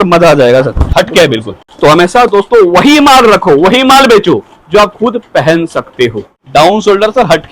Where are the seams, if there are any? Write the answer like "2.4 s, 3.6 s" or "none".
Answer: 0.8 s, 1.6 s, 6.3 s